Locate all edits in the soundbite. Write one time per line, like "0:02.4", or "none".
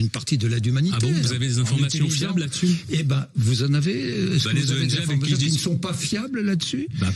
none